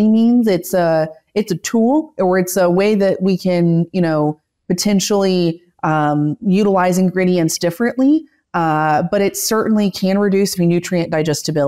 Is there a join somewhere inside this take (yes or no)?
yes